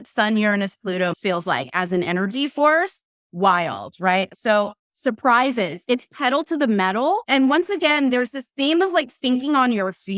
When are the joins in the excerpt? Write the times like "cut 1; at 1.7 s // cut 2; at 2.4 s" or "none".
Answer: cut 1; at 1.1 s // cut 2; at 4.3 s // cut 3; at 5.8 s // cut 4; at 7.2 s